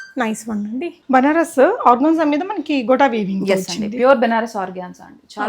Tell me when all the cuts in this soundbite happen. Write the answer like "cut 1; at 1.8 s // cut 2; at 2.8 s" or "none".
cut 1; at 1.0 s